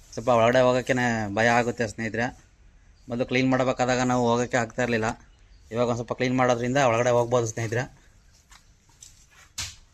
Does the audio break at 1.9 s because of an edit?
no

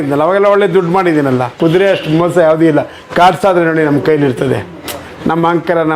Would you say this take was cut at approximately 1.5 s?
yes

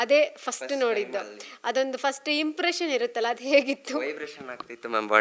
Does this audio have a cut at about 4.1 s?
no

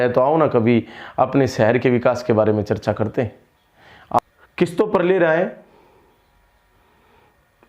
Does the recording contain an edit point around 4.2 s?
yes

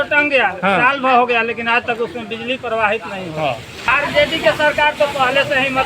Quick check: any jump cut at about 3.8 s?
yes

